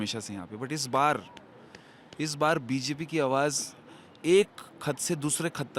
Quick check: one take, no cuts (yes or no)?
yes